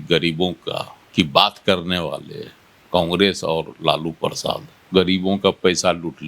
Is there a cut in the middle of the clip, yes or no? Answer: yes